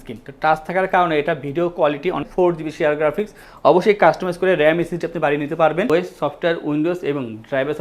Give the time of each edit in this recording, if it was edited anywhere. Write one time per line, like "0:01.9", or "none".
0:02.3
0:05.9